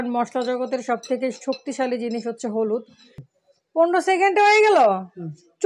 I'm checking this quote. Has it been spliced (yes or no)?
yes